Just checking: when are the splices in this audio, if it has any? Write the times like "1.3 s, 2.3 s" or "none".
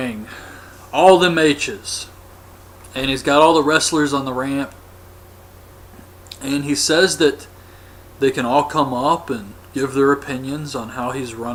none